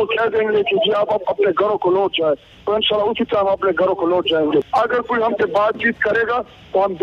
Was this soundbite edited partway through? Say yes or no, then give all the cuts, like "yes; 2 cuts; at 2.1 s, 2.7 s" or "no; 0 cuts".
yes; 1 cut; at 4.7 s